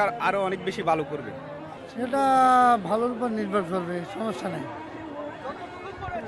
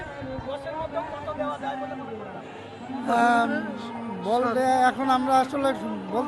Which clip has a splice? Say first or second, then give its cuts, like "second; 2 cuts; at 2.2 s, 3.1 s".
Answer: first; 1 cut; at 1.8 s